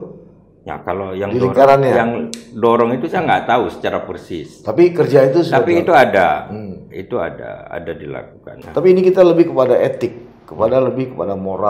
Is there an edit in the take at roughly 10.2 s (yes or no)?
no